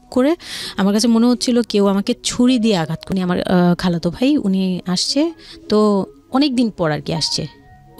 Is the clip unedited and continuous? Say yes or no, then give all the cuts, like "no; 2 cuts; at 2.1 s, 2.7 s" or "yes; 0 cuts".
no; 1 cut; at 3.0 s